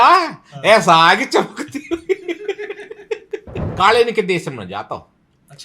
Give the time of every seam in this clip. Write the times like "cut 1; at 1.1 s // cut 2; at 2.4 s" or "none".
cut 1; at 3.6 s